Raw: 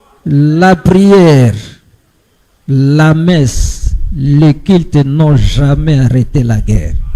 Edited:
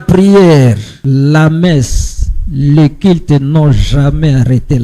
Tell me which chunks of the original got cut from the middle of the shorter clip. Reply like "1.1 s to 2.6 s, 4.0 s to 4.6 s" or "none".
1.7 s to 2.6 s